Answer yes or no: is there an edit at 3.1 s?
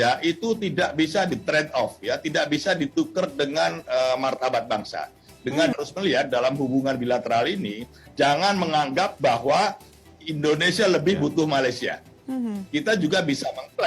no